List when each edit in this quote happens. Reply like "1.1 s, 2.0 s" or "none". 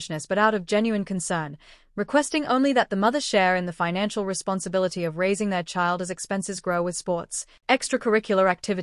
6.5 s